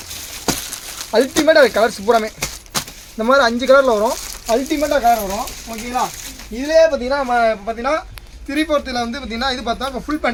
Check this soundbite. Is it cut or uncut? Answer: uncut